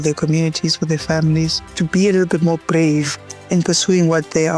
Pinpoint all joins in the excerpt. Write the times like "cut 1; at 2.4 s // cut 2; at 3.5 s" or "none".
cut 1; at 1.6 s